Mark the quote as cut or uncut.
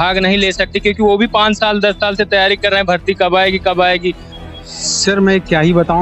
cut